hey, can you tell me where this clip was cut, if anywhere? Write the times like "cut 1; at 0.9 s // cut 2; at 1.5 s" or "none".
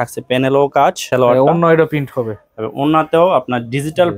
cut 1; at 1.0 s